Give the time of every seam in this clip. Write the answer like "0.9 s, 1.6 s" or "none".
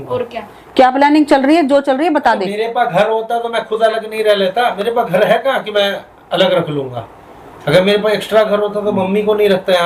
none